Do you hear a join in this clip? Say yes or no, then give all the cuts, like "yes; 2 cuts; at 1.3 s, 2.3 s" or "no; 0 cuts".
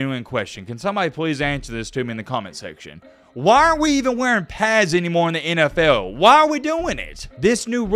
no; 0 cuts